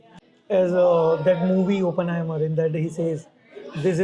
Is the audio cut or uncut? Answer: uncut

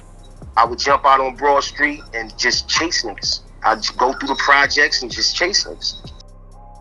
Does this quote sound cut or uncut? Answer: cut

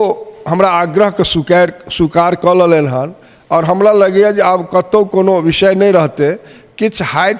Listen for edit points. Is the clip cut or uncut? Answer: uncut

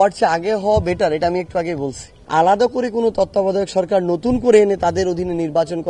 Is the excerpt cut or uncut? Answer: cut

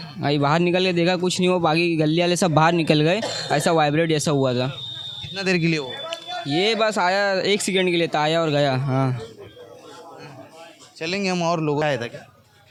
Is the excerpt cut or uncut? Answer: uncut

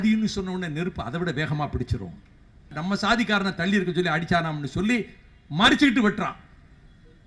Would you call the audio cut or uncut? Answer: cut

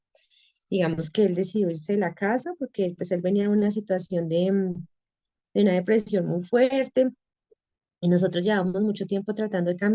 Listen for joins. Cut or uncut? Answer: uncut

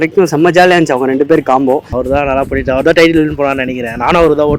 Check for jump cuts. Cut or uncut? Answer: cut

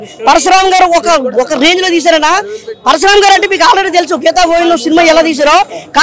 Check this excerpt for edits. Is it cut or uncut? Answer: uncut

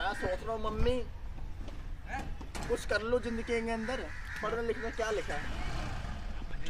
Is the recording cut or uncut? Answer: uncut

